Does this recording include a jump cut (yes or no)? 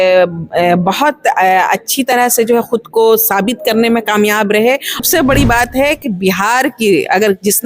yes